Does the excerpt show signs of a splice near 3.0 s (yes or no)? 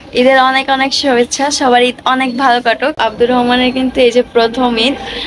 yes